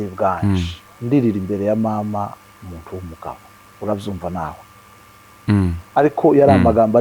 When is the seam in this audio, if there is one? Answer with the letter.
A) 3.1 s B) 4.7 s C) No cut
C